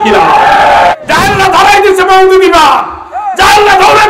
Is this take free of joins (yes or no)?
no